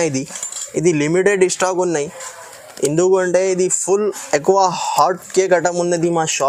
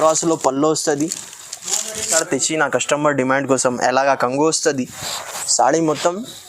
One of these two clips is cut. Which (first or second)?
second